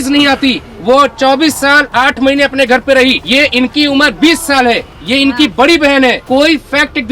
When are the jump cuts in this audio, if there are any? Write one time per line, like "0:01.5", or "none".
0:03.2
0:06.2